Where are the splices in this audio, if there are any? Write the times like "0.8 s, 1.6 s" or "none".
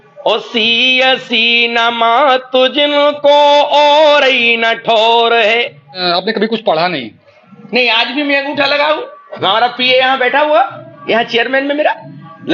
6.0 s